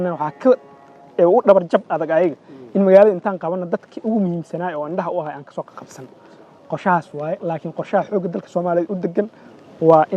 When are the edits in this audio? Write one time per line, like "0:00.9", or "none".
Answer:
none